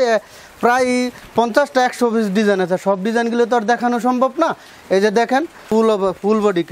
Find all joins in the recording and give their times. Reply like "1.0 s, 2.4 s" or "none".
5.7 s